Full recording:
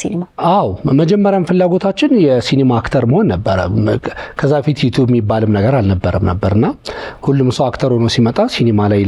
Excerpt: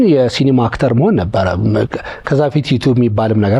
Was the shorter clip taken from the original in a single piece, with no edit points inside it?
yes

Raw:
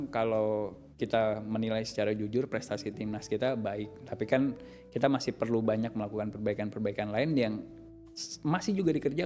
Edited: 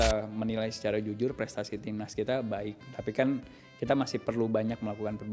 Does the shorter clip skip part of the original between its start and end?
no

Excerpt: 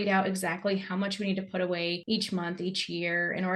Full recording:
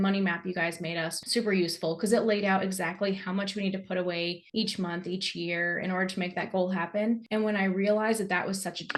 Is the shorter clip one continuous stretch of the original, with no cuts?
no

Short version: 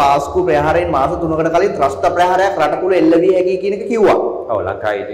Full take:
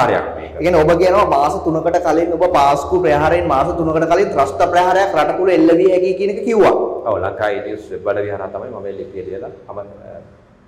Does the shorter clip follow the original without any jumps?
yes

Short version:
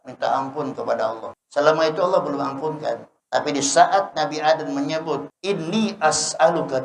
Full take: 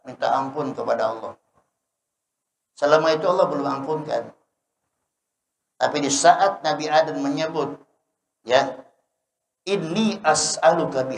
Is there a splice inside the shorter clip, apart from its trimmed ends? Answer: yes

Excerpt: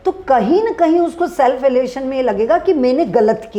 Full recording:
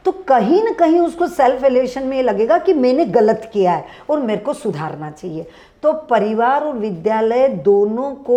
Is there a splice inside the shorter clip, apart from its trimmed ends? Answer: no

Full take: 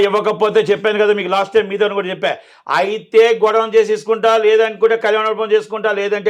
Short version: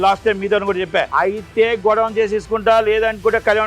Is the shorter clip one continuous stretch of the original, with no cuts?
no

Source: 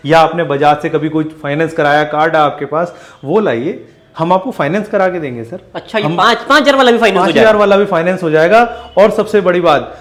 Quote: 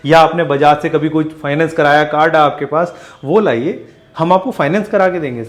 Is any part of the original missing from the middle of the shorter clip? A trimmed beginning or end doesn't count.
no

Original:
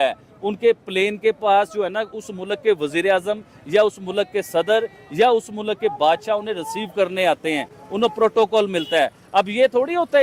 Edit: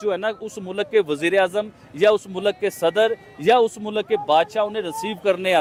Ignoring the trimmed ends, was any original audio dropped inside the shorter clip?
no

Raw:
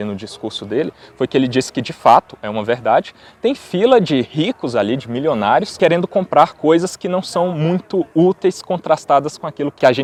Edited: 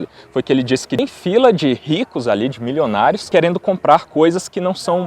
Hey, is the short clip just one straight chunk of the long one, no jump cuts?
no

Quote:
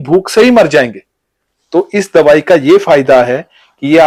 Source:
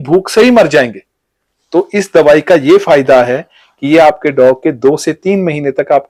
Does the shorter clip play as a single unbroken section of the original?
yes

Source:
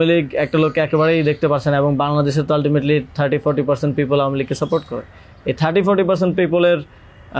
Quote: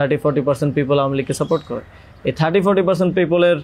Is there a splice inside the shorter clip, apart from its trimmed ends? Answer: no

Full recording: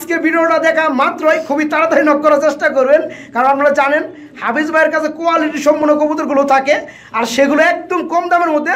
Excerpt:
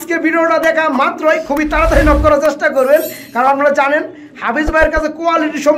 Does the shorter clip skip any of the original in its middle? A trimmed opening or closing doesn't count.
no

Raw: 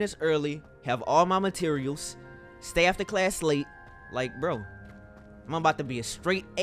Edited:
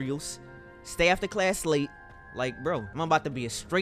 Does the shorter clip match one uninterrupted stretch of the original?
no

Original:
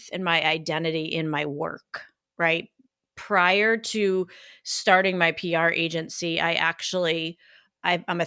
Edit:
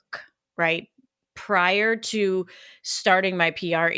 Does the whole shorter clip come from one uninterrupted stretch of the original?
yes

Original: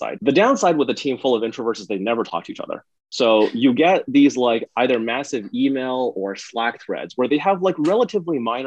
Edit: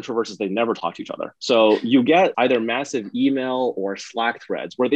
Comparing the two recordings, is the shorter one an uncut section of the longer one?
no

